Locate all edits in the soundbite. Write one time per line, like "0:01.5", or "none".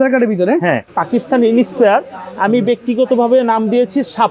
0:00.9